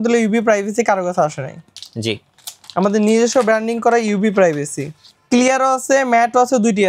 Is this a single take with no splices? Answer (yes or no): yes